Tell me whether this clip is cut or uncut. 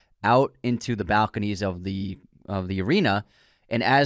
uncut